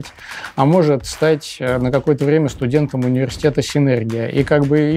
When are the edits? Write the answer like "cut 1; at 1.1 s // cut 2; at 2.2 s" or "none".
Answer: none